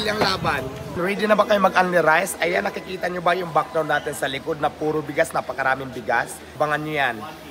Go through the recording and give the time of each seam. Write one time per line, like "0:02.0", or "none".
0:01.0
0:06.4